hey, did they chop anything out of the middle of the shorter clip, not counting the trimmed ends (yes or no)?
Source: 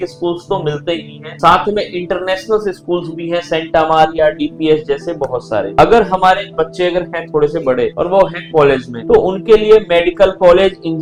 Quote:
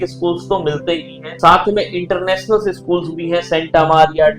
no